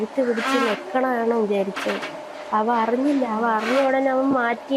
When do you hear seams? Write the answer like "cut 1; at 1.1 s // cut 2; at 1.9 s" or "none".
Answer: none